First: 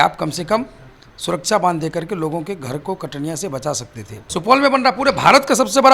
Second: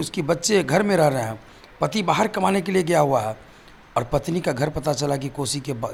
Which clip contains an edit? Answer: first; 1 cut; at 4.3 s

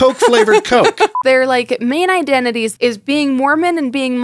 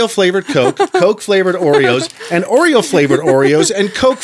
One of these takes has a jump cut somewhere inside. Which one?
first; 2 cuts; at 1.2 s, 2.7 s

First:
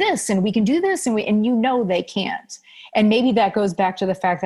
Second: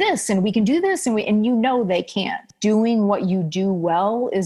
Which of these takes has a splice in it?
second; 1 cut; at 2.5 s

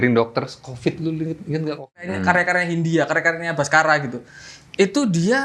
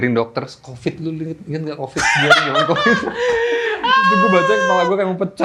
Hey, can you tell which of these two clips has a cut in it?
first; 1 cut; at 2.0 s

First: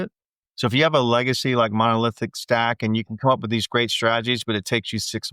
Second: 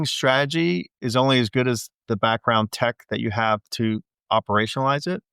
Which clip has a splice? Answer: second; 3 cuts; at 1.0 s, 2.0 s, 4.2 s

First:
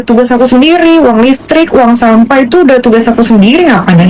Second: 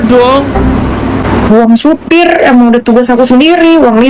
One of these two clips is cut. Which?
second; 1 cut; at 1.2 s

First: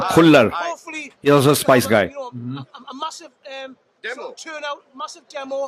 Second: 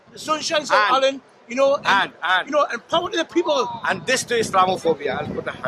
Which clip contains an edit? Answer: first; 1 cut; at 4.0 s

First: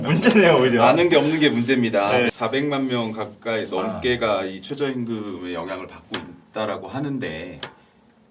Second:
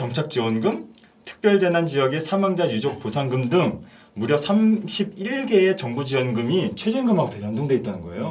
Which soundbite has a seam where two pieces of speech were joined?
first; 1 cut; at 2.3 s

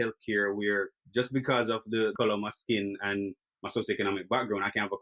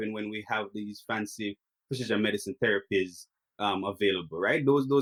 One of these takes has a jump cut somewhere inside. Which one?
first; 1 cut; at 1.0 s

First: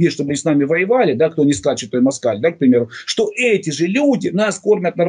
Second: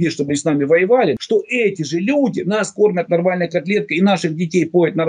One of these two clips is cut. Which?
second; 1 cut; at 1.1 s

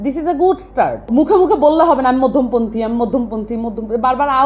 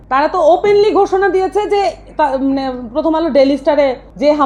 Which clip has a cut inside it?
first; 1 cut; at 1.1 s

